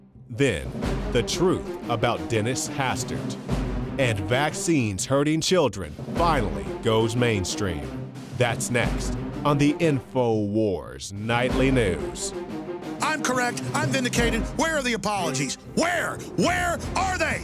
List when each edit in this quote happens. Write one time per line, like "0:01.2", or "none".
0:11.6